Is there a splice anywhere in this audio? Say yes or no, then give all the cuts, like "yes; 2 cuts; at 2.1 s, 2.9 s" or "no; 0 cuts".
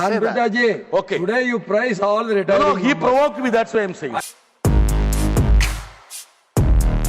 yes; 1 cut; at 4.3 s